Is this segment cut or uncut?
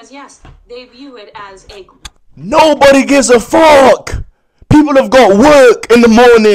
uncut